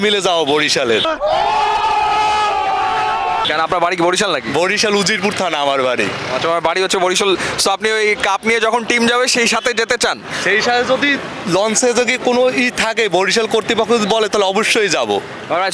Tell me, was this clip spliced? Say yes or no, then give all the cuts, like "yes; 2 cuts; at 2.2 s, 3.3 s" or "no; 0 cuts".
no; 0 cuts